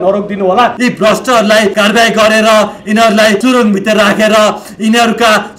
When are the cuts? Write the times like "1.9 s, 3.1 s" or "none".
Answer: 0.8 s, 1.7 s, 3.4 s